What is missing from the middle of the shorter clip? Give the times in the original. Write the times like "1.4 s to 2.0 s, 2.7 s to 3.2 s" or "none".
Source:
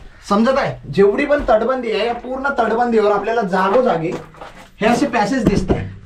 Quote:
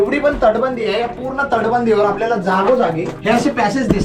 4.2 s to 4.7 s